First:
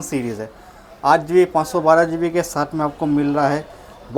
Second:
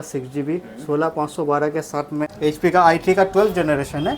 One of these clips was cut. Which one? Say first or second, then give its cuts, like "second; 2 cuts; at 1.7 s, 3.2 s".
second; 1 cut; at 2.3 s